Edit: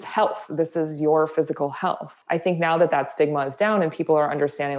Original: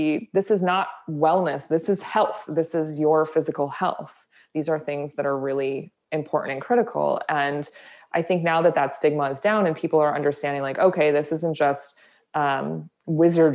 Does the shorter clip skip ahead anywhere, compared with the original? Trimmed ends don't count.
yes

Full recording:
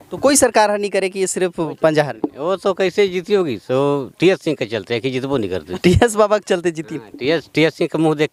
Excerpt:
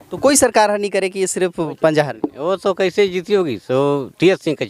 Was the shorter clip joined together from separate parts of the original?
no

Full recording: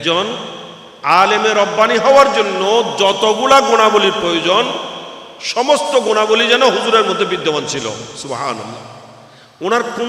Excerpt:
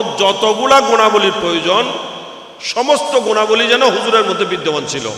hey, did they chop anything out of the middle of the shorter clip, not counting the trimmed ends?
no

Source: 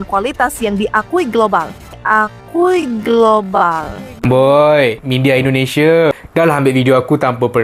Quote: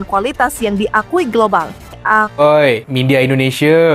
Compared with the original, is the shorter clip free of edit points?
no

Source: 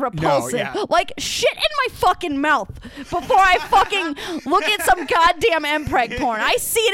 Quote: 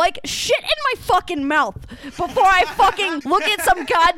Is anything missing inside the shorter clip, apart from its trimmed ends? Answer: yes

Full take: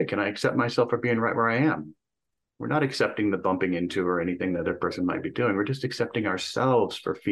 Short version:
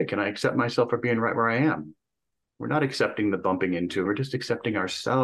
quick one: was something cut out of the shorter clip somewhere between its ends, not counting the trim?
yes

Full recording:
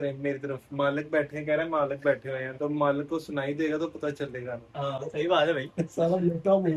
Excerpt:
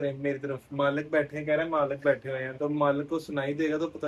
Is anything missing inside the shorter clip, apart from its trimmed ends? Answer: no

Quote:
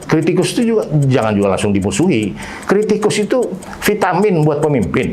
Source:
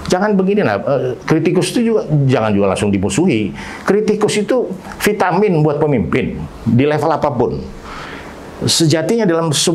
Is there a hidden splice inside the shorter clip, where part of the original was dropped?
no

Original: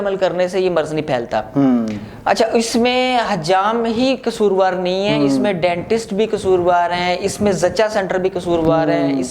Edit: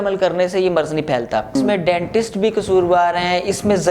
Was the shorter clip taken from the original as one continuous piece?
no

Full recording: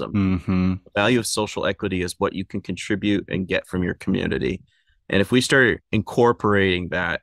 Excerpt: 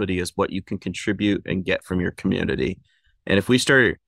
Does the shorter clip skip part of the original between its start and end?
no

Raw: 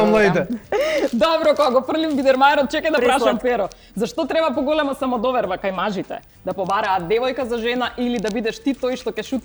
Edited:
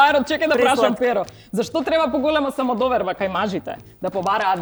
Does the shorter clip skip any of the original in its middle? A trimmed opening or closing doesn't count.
no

